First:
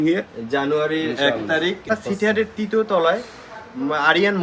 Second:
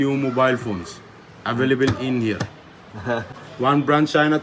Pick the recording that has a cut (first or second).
first